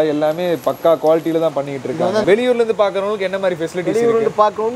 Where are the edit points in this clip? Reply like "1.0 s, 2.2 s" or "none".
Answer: 2.2 s